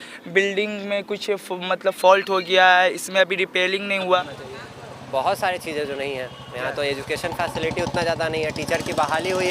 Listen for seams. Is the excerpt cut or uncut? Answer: cut